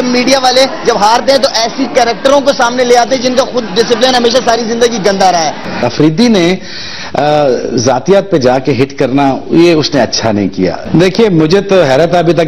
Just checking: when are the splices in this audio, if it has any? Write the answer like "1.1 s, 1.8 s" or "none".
5.9 s, 10.8 s

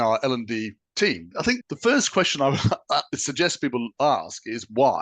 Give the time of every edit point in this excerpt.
1.3 s

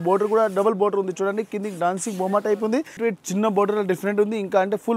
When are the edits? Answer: 3.0 s

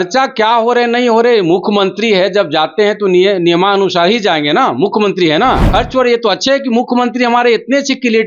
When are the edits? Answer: 5.6 s

